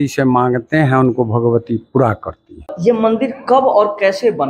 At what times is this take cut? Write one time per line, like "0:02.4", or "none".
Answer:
0:02.6